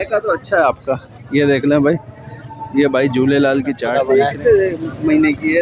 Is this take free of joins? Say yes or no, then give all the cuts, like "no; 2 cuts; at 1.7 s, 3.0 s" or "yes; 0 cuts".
no; 1 cut; at 3.9 s